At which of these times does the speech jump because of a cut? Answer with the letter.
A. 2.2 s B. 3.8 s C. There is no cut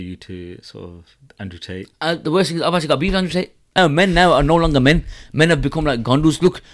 B